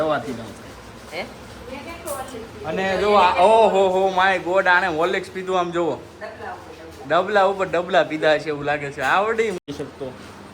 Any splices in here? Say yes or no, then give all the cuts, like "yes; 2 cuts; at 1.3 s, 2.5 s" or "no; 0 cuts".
yes; 1 cut; at 9.6 s